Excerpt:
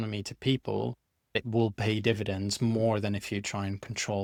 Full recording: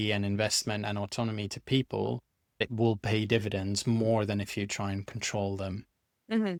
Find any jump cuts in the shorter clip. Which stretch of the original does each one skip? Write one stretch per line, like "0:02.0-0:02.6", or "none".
none